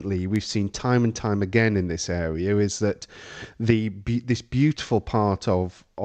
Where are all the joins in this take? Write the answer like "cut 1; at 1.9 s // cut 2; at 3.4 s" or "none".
none